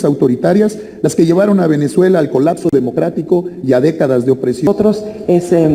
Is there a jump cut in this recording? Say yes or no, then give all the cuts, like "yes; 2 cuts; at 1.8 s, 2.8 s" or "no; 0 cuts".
yes; 1 cut; at 4.7 s